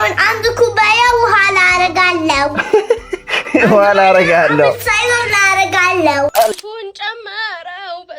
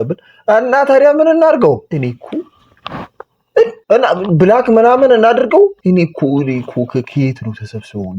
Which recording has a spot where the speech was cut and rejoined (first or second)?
first